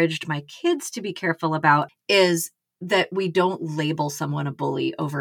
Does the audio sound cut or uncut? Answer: cut